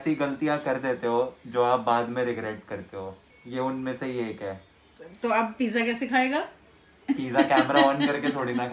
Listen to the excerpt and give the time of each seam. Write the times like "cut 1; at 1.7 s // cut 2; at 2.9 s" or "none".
none